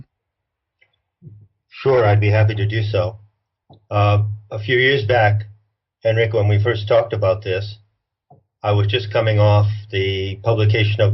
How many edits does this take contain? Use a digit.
1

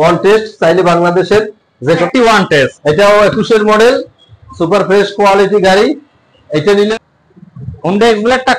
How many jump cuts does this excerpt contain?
2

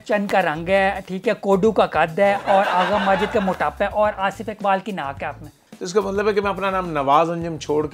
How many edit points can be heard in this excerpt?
1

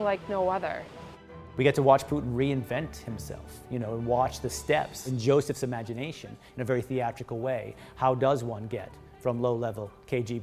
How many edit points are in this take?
2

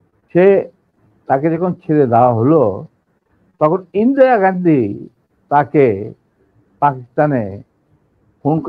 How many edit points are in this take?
0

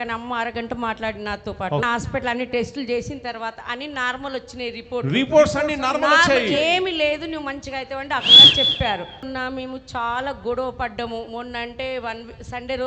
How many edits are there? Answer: 2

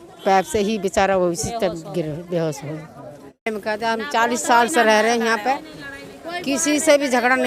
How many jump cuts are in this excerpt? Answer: 1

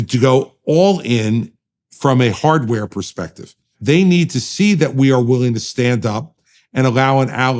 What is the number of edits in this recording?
1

